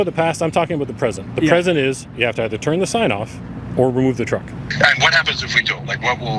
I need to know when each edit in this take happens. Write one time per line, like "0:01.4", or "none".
0:04.6